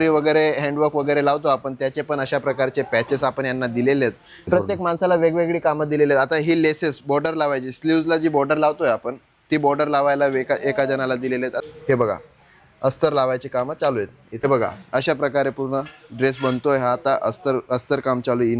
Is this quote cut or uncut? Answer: cut